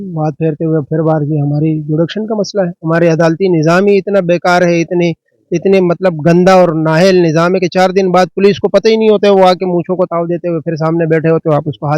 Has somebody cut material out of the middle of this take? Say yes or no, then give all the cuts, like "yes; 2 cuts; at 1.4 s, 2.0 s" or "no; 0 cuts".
no; 0 cuts